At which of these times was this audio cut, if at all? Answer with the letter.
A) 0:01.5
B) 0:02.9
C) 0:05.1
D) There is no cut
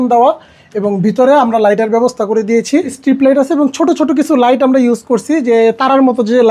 B